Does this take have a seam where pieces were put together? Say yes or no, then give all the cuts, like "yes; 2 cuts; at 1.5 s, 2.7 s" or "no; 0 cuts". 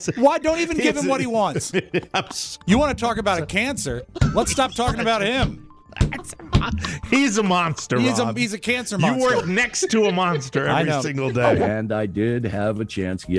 yes; 1 cut; at 11.6 s